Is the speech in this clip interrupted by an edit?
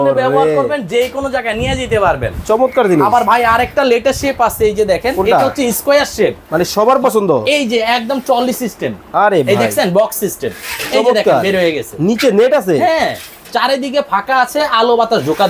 no; 0 cuts

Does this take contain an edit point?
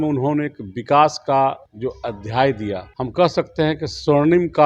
yes; 2 cuts; at 1.7 s, 2.9 s

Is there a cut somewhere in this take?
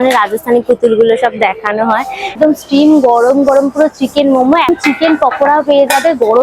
yes; 2 cuts; at 2.3 s, 4.7 s

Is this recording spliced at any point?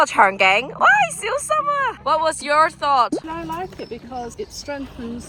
no; 0 cuts

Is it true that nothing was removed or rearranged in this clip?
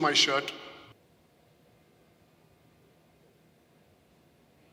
no; 1 cut; at 0.9 s

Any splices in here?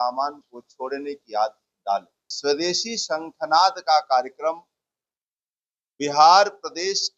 yes; 1 cut; at 2.2 s

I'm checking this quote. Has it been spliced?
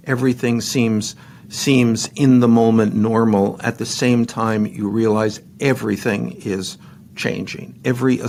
no; 0 cuts

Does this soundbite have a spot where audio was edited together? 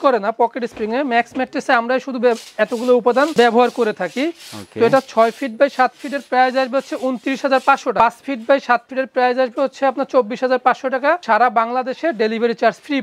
no; 0 cuts

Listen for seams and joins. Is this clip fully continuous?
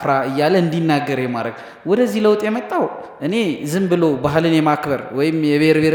yes; 0 cuts

